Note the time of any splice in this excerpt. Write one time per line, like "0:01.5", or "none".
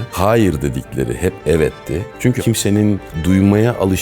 0:02.4